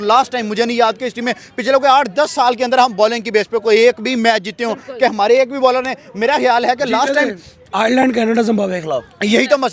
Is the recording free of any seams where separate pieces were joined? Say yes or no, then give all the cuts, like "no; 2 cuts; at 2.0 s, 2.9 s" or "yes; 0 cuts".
yes; 0 cuts